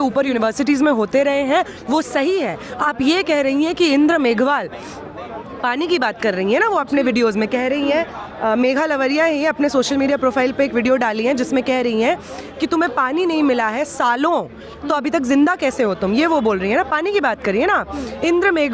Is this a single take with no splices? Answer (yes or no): yes